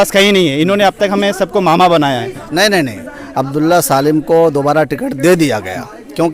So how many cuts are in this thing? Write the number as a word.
one